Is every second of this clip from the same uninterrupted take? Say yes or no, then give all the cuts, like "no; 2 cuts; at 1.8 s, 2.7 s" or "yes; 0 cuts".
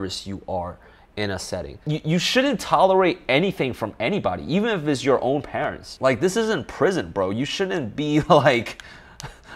no; 1 cut; at 1.9 s